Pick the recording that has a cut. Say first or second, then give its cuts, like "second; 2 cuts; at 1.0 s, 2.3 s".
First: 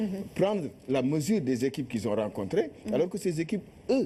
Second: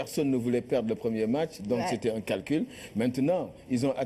second; 1 cut; at 3.1 s